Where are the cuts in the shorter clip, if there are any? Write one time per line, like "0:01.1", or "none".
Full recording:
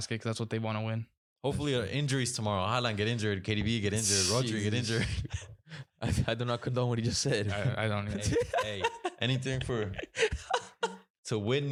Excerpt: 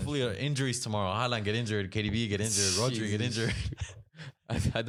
none